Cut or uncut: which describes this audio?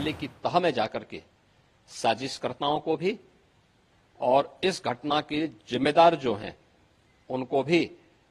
uncut